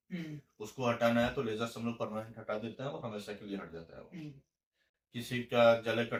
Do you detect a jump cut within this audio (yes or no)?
no